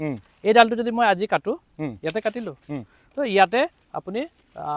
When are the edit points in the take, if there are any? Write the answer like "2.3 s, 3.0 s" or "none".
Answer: none